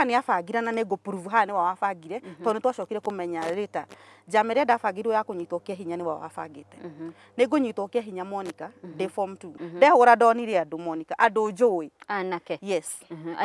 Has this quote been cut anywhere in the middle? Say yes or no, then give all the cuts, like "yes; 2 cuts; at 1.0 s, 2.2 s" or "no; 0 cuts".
yes; 1 cut; at 9.6 s